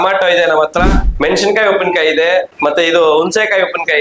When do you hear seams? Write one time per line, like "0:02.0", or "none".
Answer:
0:01.0
0:02.5